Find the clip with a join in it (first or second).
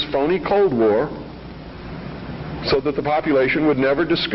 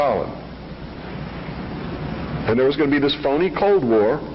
first